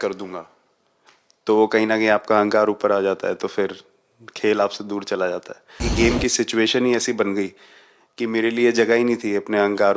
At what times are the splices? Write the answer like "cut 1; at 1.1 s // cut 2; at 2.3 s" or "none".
cut 1; at 5.9 s